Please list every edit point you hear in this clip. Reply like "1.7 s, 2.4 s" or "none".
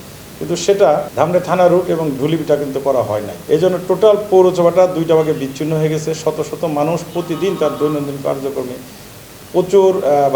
1.1 s, 3.3 s

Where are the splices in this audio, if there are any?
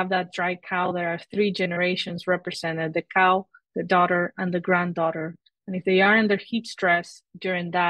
none

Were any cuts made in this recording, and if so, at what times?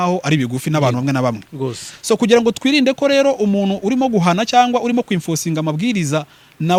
none

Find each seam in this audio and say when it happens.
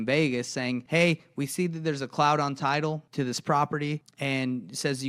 0.8 s, 3.0 s, 4.1 s

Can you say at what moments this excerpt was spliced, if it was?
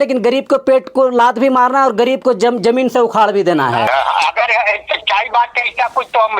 3.9 s

